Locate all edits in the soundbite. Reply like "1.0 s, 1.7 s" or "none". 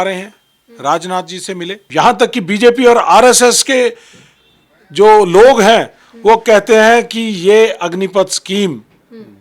1.8 s